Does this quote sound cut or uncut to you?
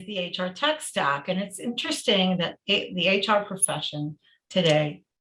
uncut